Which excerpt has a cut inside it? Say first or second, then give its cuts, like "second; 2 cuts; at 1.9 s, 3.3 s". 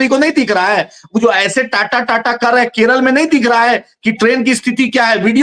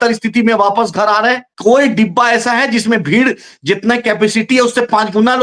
second; 1 cut; at 1.5 s